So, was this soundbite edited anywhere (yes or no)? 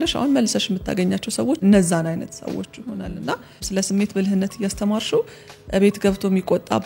yes